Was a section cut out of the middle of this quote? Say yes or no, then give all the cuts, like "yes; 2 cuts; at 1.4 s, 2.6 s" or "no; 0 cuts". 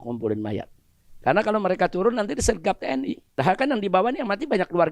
yes; 1 cut; at 3.3 s